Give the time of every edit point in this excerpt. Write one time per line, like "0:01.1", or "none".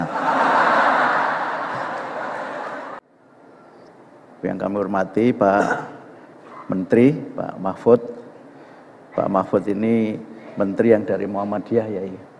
0:02.9

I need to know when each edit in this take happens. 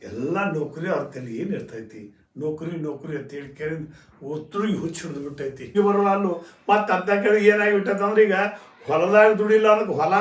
0:05.7

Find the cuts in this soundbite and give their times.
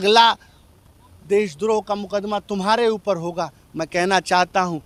none

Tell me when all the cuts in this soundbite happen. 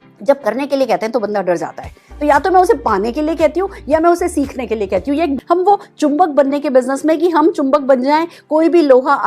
0:05.3

